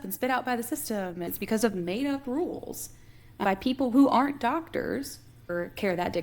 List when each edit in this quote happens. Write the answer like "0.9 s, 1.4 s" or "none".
1.3 s, 5.5 s